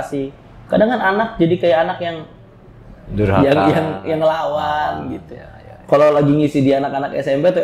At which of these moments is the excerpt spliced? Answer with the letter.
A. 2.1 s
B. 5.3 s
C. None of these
C